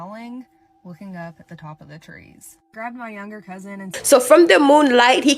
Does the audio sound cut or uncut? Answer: cut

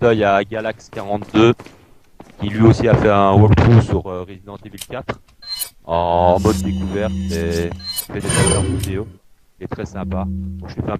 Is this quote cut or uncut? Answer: cut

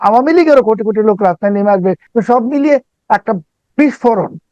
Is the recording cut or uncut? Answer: cut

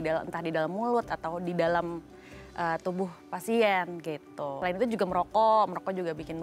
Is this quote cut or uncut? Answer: cut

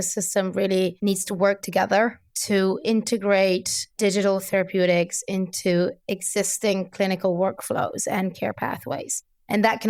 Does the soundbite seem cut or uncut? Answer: uncut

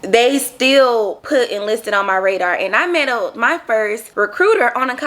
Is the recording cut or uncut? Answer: cut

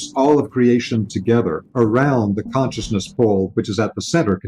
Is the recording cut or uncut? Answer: uncut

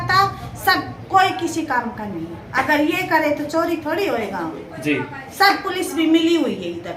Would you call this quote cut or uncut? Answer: uncut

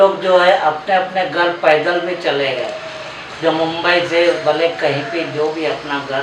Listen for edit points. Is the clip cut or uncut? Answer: uncut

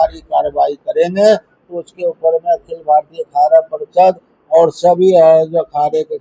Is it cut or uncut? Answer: uncut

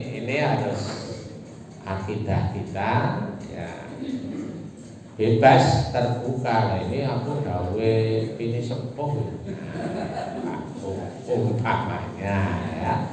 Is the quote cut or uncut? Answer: uncut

